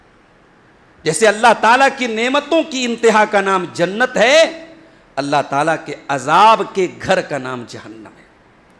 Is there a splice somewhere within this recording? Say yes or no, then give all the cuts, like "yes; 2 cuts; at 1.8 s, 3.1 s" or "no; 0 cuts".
no; 0 cuts